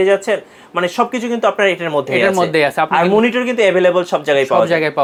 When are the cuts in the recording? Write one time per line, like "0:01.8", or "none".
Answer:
none